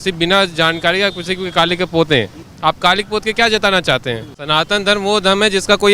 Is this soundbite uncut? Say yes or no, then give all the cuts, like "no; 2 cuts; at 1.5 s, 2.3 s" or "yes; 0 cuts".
no; 2 cuts; at 2.4 s, 4.3 s